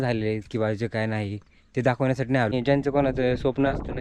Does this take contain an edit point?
yes; 1 cut; at 2.5 s

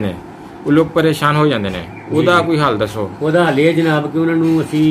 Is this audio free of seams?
yes; 0 cuts

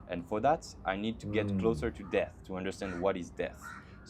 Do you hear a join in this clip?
no; 0 cuts

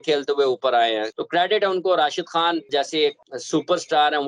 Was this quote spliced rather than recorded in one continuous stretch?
yes; 2 cuts; at 1.1 s, 3.0 s

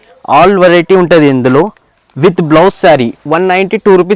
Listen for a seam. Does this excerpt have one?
yes; 1 cut; at 3.2 s

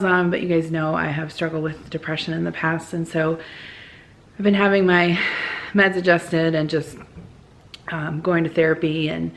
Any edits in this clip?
no; 0 cuts

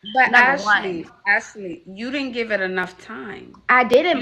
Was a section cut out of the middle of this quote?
no; 0 cuts

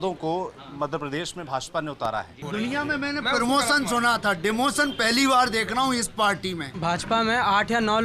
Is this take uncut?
no; 2 cuts; at 2.4 s, 6.7 s

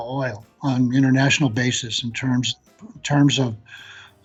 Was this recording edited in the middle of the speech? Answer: no; 0 cuts

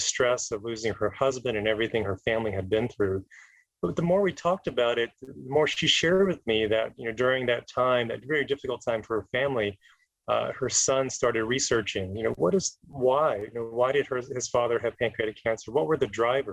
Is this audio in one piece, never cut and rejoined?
yes; 0 cuts

